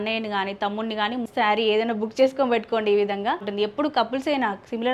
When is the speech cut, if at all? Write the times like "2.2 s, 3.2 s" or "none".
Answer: 1.3 s, 3.5 s